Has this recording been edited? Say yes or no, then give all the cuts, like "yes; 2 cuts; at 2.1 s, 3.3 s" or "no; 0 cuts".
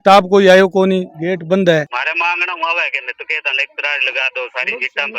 yes; 1 cut; at 1.9 s